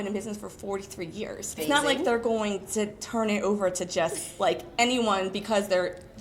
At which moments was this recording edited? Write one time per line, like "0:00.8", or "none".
0:01.6